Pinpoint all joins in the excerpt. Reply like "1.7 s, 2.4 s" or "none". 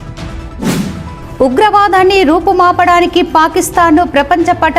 1.0 s